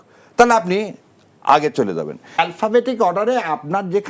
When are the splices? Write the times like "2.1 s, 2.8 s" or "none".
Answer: 2.4 s